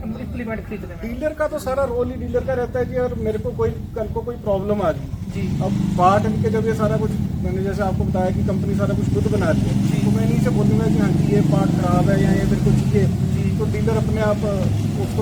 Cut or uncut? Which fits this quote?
uncut